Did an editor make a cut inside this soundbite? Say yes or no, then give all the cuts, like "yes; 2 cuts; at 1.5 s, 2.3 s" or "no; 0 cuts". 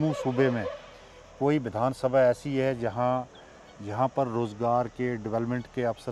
no; 0 cuts